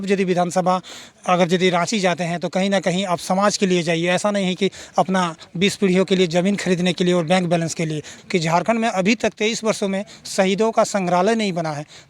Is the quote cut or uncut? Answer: cut